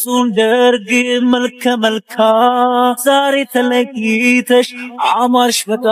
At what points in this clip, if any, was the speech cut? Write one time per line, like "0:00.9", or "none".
none